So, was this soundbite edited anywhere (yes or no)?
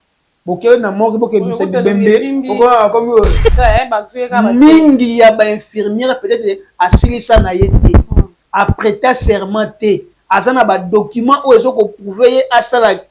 yes